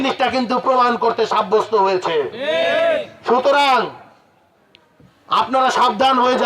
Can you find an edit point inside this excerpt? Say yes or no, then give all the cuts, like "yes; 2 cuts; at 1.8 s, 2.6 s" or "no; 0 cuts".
no; 0 cuts